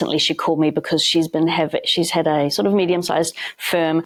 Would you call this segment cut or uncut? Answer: uncut